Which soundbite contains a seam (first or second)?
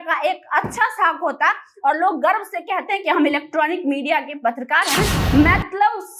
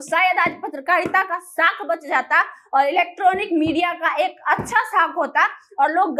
first